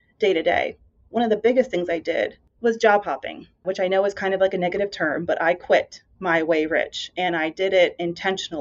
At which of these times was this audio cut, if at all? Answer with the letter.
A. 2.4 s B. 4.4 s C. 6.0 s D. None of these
A